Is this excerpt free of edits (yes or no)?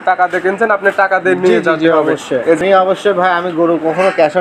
no